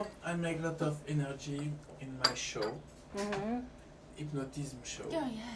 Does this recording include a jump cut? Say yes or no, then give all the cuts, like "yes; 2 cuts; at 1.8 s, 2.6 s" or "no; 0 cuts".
no; 0 cuts